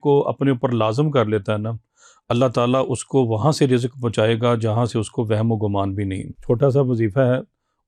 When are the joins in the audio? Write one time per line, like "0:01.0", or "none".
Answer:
0:06.3